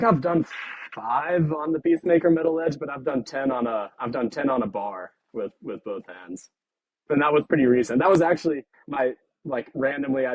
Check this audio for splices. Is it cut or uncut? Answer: cut